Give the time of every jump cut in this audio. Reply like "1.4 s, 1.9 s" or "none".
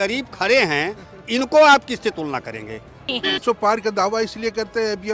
3.4 s